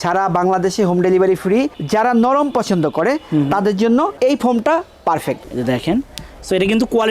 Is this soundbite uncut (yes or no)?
no